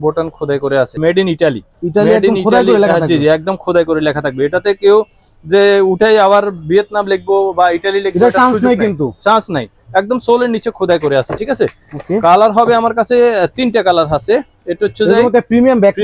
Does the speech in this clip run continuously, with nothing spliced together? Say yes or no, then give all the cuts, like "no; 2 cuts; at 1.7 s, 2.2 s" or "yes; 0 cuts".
yes; 0 cuts